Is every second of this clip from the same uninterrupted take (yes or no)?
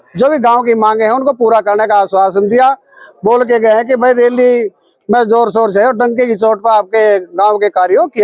yes